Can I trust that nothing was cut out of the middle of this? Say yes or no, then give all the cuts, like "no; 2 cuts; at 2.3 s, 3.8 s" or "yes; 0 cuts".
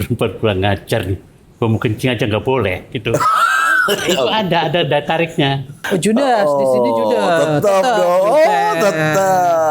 no; 1 cut; at 5.7 s